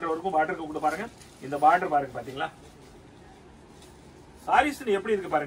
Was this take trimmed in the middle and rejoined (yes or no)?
no